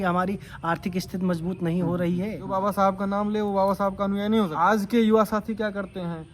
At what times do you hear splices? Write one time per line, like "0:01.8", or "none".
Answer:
0:02.5
0:04.5